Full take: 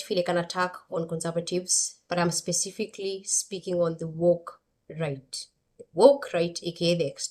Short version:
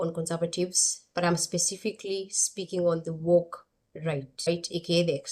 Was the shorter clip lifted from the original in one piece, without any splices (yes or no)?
no